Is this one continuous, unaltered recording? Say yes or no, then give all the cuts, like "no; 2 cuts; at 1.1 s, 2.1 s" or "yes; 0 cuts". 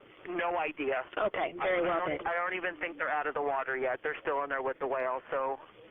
no; 1 cut; at 1.3 s